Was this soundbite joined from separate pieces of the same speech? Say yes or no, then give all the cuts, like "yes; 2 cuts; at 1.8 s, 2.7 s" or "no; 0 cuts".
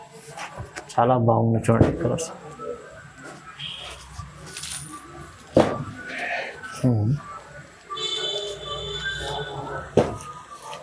no; 0 cuts